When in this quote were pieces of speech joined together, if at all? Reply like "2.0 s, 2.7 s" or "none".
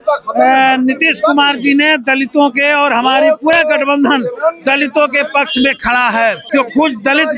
6.4 s